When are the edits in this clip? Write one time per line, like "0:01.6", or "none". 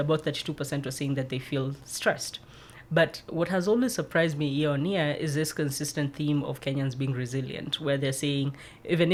none